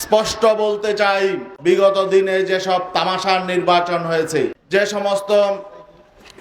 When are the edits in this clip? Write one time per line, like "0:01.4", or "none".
0:01.5
0:04.6